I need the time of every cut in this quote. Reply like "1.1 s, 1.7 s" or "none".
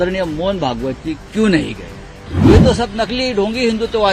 2.5 s